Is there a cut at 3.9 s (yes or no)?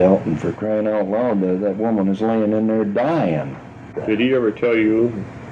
yes